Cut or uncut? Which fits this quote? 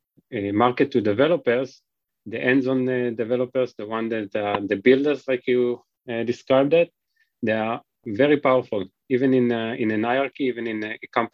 uncut